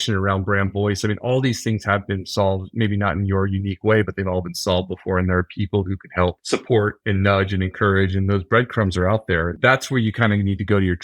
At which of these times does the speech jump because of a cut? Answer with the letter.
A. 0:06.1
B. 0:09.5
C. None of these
B